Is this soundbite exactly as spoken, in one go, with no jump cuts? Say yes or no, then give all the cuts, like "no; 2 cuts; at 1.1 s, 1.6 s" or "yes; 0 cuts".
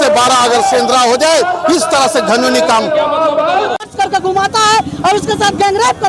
no; 1 cut; at 3.8 s